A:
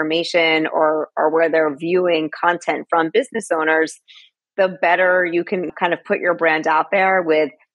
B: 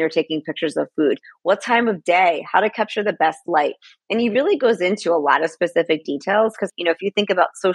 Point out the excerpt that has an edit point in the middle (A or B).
B